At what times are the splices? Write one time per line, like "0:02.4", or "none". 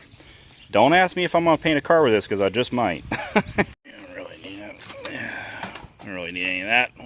0:03.8